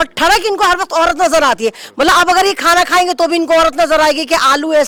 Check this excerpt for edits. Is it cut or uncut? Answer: uncut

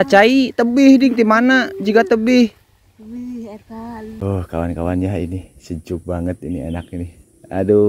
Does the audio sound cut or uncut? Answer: cut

